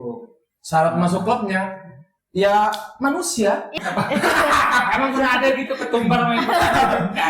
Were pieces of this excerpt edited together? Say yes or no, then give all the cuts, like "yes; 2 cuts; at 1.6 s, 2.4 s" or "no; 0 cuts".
yes; 1 cut; at 3.7 s